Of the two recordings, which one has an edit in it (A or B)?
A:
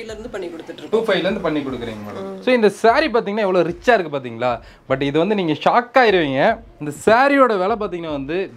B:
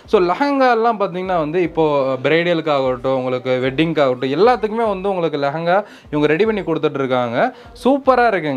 A